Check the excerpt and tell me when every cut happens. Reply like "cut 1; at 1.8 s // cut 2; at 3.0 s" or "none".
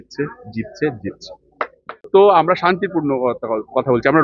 cut 1; at 2.1 s